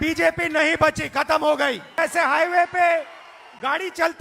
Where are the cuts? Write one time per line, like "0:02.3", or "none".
0:01.9